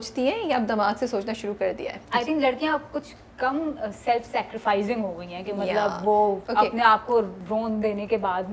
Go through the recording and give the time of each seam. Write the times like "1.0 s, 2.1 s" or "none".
1.9 s, 6.4 s, 7.4 s